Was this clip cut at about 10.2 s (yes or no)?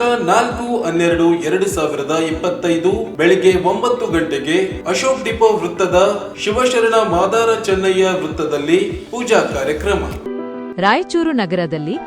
yes